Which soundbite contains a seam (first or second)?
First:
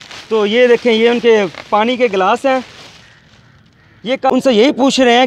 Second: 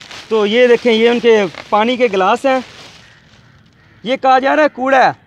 first